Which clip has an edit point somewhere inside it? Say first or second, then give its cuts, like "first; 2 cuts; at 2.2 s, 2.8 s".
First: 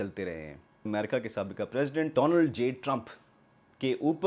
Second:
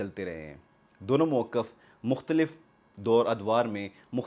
first; 2 cuts; at 0.8 s, 2.1 s